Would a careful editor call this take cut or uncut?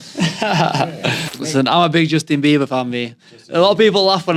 cut